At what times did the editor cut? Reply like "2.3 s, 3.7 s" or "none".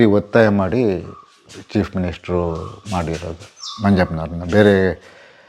none